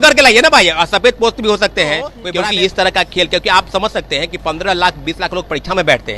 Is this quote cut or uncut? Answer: cut